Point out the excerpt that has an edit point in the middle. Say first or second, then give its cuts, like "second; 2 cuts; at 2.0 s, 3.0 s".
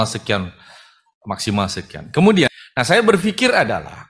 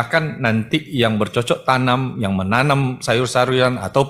first; 1 cut; at 2.5 s